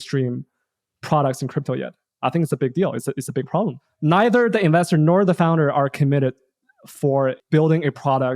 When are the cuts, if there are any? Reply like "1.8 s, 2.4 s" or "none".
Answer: 7.4 s